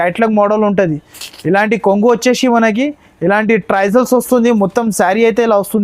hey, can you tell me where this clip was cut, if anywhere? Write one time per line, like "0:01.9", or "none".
none